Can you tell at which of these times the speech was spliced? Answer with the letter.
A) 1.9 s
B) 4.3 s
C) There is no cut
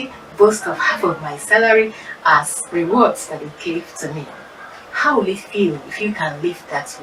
C